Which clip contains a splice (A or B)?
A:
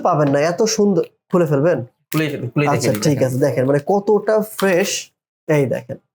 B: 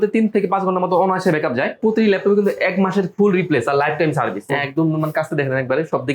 B